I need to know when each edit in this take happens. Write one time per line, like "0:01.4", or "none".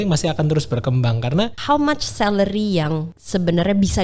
0:01.6
0:03.1